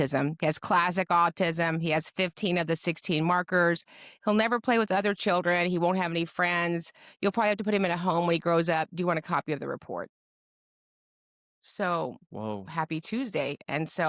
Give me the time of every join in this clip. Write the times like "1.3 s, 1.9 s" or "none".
none